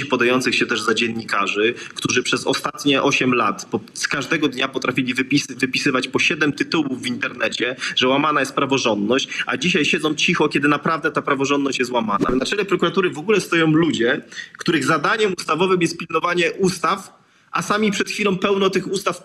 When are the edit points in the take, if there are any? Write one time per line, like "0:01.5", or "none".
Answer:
0:12.3